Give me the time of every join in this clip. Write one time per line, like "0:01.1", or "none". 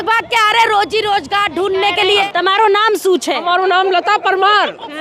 0:02.2